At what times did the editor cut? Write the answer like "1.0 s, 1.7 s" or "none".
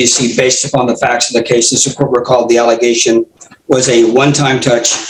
none